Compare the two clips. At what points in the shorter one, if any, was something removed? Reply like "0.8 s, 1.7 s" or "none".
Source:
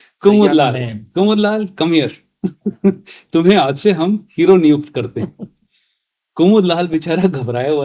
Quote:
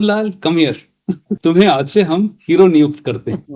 1.3 s